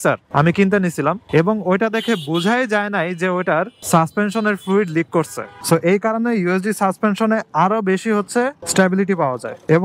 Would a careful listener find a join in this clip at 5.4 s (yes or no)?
yes